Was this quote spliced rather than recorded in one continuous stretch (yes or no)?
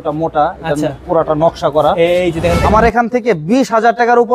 yes